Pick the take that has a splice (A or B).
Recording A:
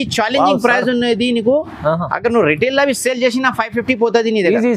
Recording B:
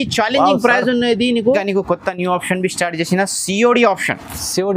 B